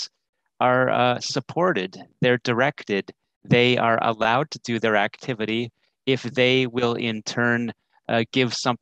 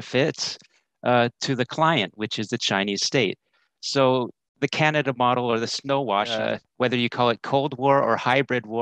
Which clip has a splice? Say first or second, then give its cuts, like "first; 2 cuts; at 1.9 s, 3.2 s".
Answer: second; 1 cut; at 6.4 s